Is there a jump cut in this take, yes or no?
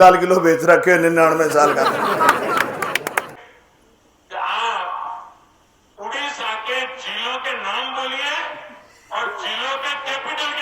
yes